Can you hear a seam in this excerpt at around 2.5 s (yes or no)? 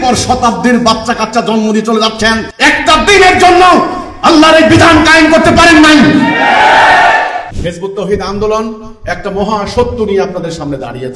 yes